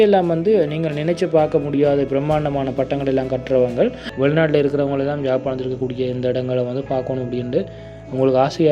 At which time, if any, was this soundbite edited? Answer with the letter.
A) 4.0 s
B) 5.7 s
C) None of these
A